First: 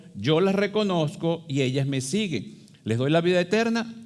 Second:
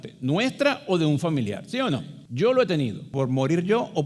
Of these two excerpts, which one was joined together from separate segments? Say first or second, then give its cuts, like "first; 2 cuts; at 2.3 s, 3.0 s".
second; 2 cuts; at 2.2 s, 3.1 s